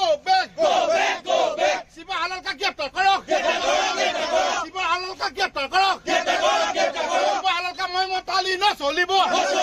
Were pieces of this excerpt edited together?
no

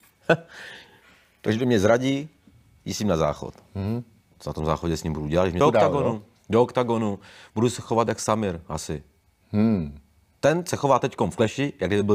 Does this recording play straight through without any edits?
no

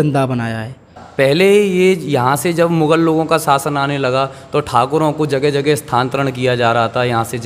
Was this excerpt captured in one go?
no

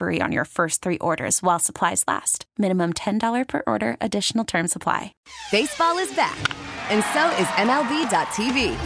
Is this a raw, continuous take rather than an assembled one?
no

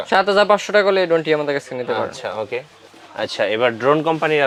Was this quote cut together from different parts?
no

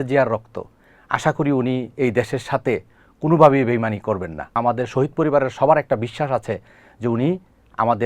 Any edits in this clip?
yes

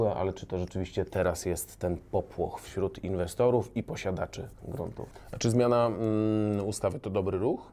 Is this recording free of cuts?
no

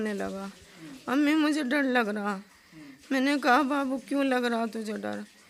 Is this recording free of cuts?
yes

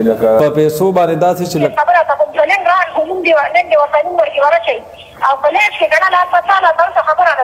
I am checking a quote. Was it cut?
yes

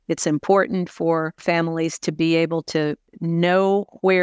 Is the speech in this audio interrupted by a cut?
yes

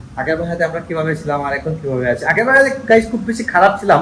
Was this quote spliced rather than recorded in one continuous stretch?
no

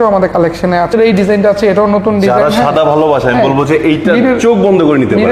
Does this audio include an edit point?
yes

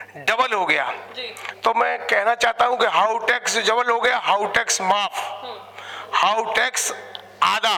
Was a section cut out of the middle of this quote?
no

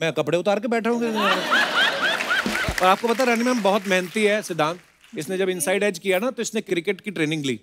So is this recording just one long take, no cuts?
no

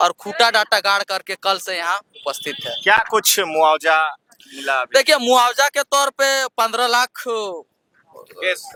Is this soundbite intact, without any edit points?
yes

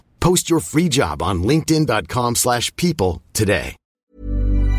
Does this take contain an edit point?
yes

